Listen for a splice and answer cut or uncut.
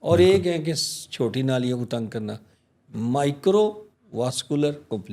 uncut